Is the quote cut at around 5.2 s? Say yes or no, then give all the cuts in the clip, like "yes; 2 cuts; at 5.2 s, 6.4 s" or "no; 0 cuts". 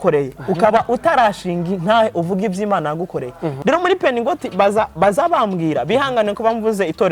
no; 1 cut; at 3.6 s